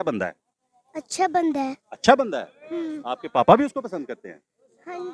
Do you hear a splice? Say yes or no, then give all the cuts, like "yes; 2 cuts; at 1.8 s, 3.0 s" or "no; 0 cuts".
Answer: no; 0 cuts